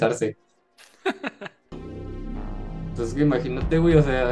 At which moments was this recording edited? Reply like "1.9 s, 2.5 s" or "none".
1.8 s